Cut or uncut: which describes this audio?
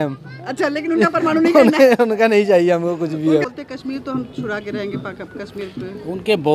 cut